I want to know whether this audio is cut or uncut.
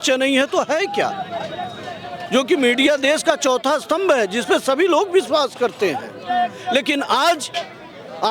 uncut